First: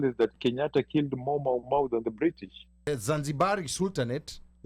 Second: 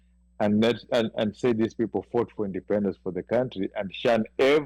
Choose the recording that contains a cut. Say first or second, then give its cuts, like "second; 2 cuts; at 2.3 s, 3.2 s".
first; 1 cut; at 2.9 s